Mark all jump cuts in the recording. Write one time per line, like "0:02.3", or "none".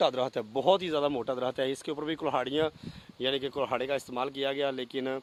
none